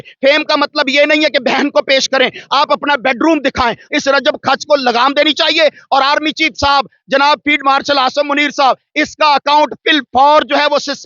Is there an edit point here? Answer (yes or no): yes